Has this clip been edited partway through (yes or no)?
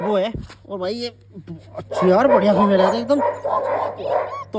no